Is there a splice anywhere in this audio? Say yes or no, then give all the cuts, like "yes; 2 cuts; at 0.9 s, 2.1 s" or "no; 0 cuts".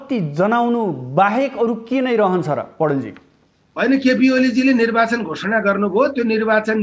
no; 0 cuts